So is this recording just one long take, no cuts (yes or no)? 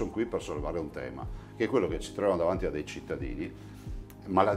yes